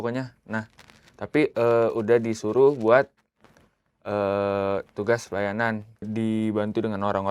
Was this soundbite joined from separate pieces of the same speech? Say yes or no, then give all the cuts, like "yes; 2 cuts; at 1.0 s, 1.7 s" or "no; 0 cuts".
yes; 1 cut; at 6.1 s